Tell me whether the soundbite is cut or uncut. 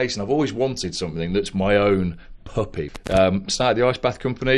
cut